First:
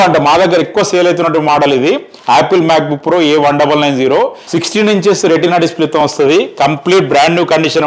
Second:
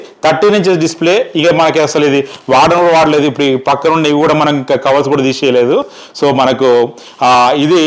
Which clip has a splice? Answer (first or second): first